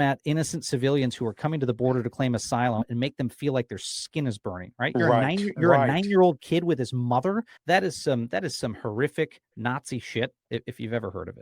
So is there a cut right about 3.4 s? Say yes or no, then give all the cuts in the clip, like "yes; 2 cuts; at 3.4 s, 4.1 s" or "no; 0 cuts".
no; 2 cuts; at 7.5 s, 10.4 s